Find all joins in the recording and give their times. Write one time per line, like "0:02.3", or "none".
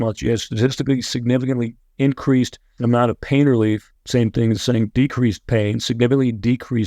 0:02.6
0:03.9